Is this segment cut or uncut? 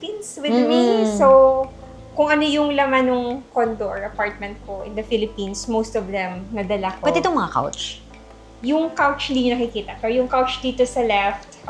uncut